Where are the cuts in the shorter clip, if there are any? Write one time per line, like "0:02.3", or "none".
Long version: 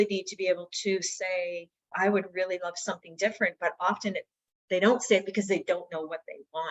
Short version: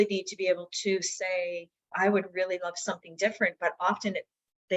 none